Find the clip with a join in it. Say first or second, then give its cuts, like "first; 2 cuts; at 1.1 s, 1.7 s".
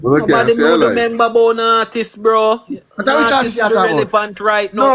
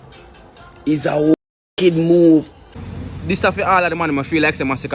second; 1 cut; at 2.7 s